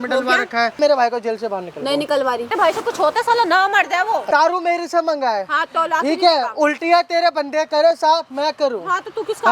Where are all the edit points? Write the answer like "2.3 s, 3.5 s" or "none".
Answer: 0.8 s, 2.5 s, 4.3 s